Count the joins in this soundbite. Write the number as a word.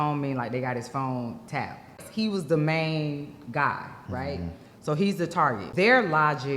two